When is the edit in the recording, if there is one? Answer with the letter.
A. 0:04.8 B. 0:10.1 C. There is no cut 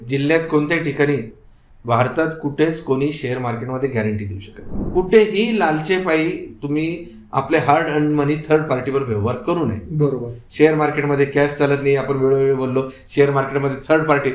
A